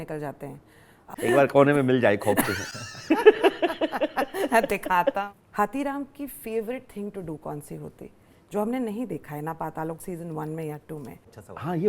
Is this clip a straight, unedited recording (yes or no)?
no